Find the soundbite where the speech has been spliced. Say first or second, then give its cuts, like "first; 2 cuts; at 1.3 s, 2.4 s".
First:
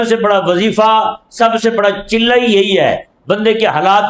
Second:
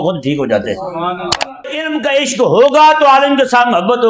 second; 1 cut; at 1.8 s